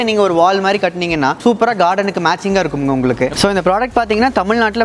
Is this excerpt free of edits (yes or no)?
no